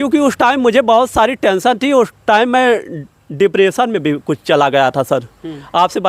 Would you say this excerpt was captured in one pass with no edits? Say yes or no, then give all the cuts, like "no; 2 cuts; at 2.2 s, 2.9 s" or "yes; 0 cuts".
yes; 0 cuts